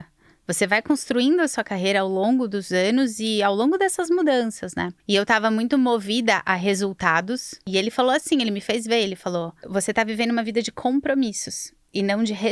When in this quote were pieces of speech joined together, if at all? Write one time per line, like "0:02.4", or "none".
0:04.9
0:07.6
0:09.6